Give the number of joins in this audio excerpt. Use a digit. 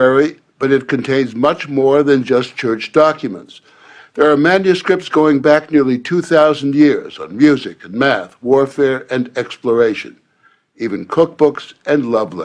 1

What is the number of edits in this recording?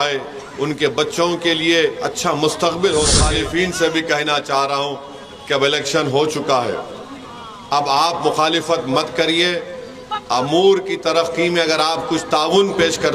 1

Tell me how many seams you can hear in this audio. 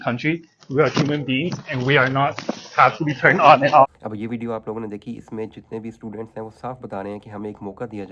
0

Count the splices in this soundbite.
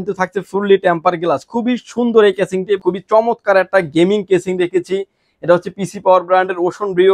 1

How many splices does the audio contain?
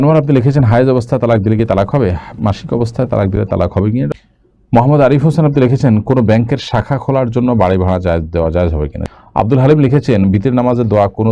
2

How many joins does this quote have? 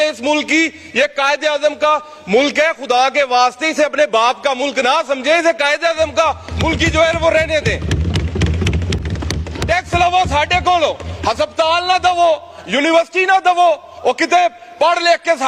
1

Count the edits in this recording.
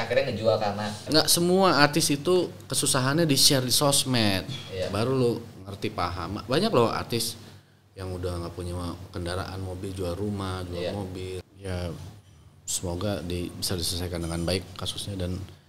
2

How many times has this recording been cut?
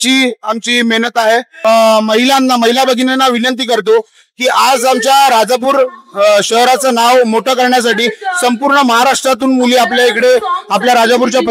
1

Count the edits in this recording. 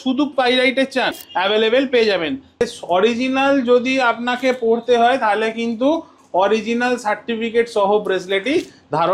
2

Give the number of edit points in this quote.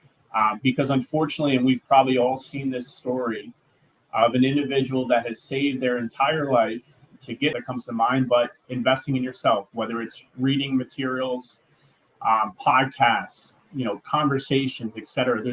1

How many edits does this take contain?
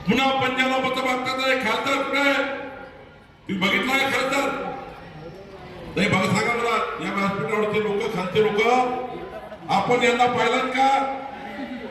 0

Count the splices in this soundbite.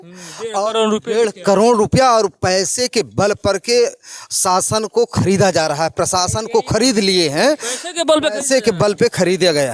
0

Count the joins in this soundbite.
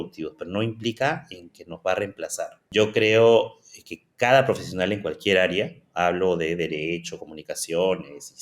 1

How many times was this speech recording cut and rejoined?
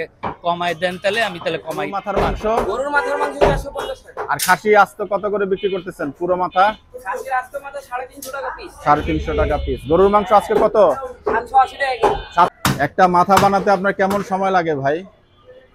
2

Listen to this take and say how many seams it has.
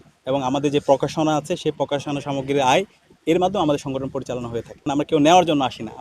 1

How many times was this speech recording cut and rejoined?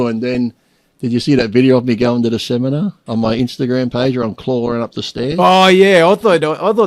1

